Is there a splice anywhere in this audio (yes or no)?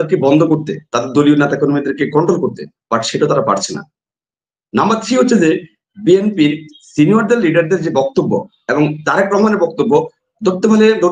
no